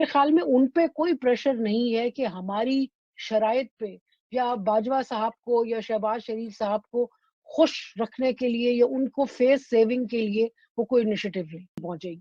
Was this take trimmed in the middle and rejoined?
no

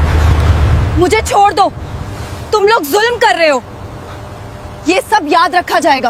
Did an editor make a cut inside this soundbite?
no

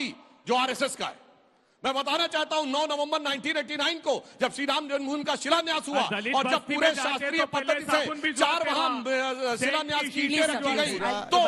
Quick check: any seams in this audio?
no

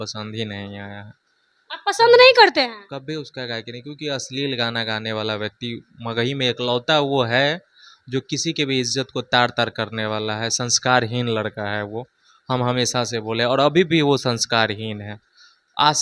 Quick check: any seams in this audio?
no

